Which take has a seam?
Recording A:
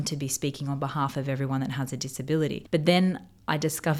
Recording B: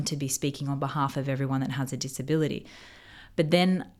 A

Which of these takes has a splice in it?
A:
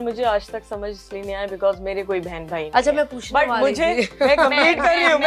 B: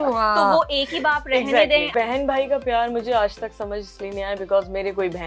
B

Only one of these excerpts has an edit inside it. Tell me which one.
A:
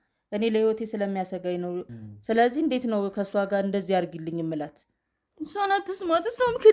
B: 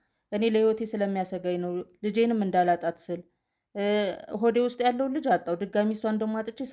A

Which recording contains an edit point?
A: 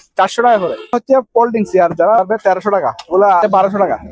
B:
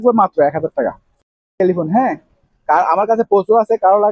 A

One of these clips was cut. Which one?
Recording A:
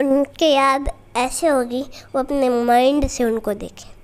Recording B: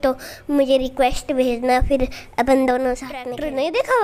B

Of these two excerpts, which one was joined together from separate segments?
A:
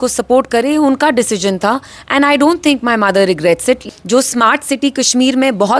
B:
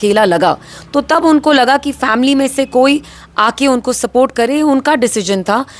A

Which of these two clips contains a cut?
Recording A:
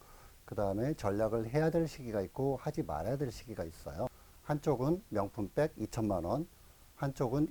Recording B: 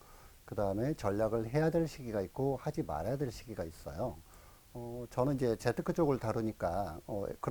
A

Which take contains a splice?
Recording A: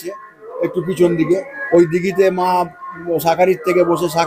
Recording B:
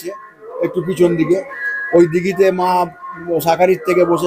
A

